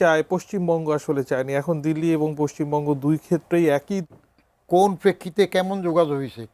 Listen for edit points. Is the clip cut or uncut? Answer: cut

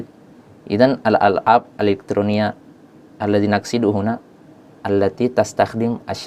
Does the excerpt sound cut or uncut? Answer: uncut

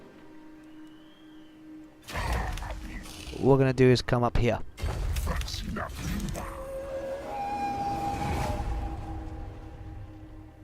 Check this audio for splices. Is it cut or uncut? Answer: cut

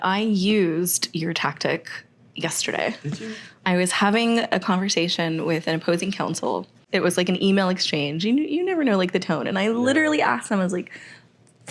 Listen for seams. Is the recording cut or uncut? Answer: cut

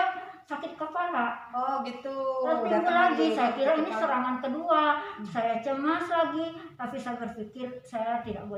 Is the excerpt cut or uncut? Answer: uncut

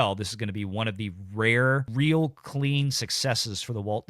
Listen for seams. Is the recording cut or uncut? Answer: cut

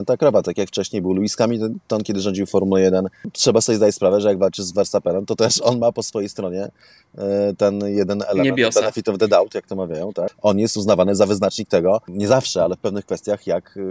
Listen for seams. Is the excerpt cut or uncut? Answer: cut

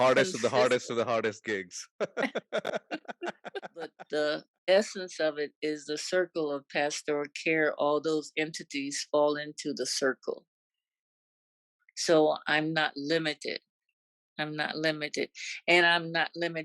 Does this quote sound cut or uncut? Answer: cut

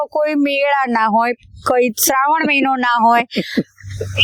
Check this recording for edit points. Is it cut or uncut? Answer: uncut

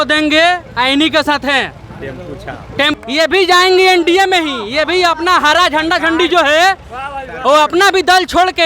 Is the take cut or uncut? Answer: cut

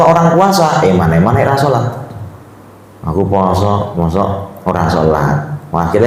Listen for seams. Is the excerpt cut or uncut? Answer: uncut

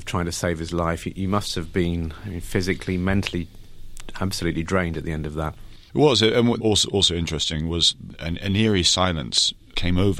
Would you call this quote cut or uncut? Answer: cut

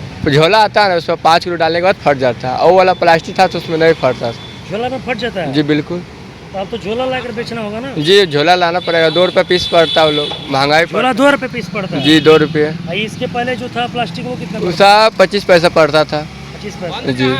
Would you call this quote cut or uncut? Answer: uncut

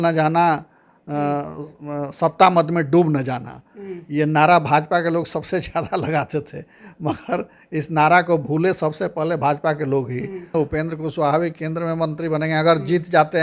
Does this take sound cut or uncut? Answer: cut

